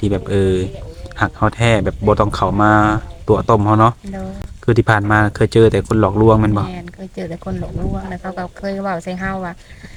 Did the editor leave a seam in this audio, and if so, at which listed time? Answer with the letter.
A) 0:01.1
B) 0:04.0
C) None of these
C